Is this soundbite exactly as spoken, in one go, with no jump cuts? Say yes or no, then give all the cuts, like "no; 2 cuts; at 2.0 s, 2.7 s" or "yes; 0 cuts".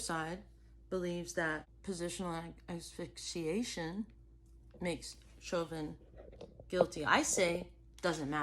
no; 1 cut; at 1.7 s